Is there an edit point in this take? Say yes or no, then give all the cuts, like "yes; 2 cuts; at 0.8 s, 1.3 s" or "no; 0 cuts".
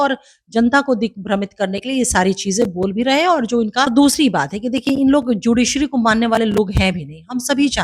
yes; 1 cut; at 3.9 s